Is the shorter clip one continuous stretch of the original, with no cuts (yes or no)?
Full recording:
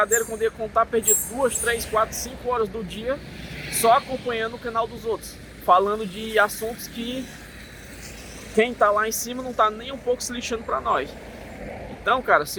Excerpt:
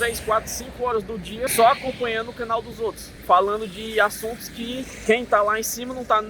no